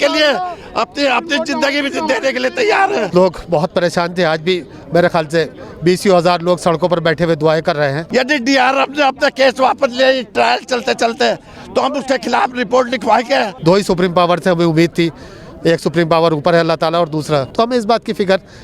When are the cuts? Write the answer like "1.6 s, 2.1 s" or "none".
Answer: 3.1 s, 8.0 s, 13.5 s, 17.5 s